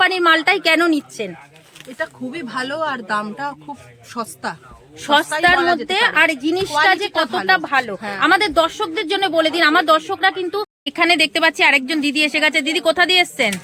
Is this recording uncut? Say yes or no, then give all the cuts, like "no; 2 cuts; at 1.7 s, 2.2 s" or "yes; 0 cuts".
no; 1 cut; at 10.8 s